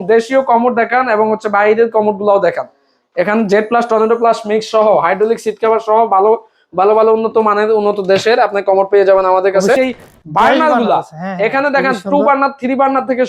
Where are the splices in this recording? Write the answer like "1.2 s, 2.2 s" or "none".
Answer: 9.8 s